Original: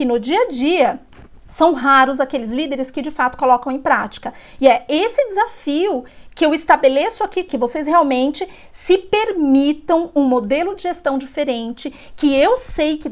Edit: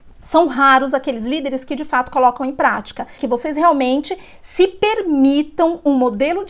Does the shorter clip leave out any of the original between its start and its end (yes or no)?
yes